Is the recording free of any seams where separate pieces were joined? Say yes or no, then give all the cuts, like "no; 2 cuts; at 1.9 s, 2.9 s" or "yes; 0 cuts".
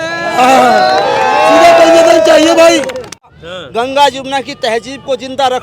no; 1 cut; at 3.3 s